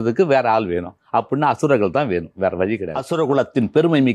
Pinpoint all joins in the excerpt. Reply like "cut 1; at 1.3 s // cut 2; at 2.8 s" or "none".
cut 1; at 3.0 s